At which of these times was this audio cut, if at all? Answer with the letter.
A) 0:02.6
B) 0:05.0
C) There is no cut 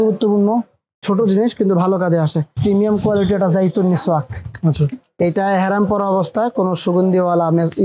A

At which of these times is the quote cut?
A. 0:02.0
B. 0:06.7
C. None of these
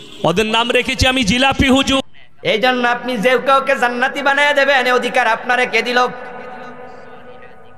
A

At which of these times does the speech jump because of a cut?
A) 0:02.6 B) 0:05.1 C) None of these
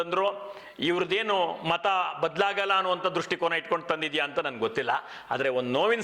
C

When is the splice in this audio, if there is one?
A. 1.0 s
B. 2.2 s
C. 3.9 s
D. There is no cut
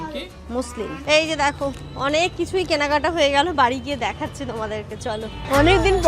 A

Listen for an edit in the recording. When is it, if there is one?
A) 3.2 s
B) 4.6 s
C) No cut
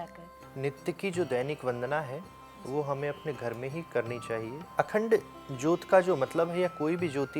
B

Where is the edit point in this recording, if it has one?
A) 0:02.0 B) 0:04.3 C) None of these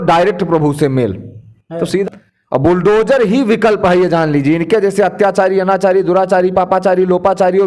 A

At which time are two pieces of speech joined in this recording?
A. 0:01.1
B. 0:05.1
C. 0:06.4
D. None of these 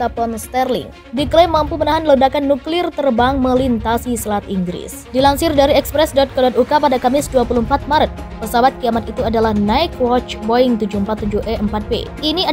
A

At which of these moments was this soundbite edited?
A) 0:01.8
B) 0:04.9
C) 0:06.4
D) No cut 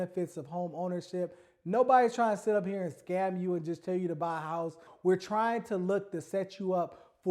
B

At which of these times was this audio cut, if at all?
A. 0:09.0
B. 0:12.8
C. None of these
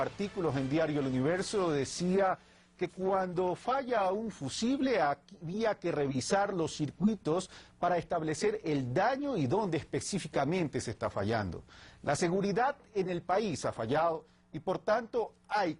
C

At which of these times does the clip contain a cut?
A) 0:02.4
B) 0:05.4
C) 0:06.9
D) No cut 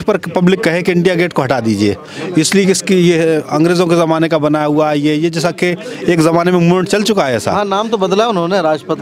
D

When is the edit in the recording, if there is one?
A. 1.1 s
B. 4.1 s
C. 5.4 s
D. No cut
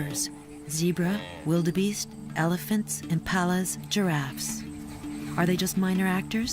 A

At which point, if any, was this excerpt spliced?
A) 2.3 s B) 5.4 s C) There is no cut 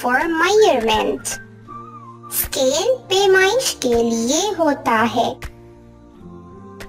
B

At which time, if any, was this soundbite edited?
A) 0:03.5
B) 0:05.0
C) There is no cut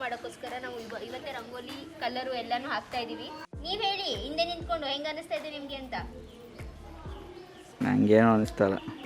A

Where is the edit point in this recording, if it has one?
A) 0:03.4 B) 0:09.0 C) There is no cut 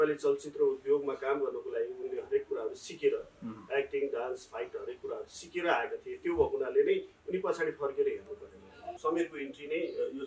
B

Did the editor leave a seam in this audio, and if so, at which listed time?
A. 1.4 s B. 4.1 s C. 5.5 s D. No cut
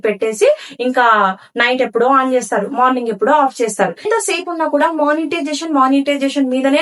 B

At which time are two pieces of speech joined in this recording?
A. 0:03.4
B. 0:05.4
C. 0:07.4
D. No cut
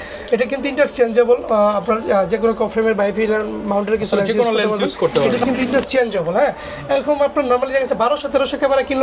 B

